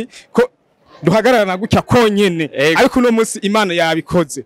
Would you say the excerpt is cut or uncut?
uncut